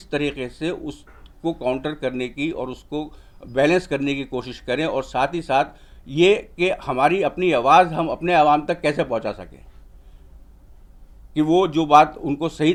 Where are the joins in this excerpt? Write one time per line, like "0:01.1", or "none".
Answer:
none